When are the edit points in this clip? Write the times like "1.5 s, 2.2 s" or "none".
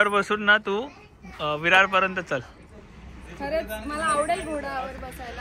none